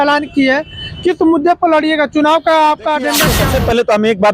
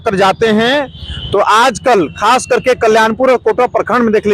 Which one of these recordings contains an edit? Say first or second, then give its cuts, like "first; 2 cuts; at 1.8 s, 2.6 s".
first; 1 cut; at 3.4 s